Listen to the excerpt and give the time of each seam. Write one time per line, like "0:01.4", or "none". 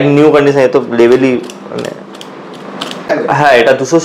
0:03.1